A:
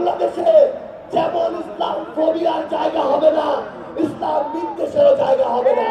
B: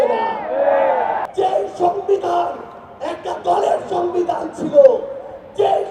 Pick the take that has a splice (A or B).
B